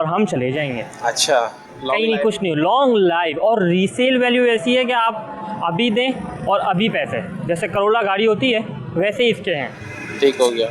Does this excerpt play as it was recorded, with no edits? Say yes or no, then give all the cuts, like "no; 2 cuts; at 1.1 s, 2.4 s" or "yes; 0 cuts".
yes; 0 cuts